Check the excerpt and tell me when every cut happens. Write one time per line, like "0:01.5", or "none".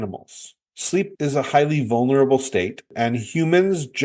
none